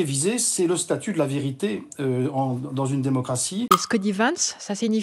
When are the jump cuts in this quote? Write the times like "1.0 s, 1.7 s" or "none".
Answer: 3.7 s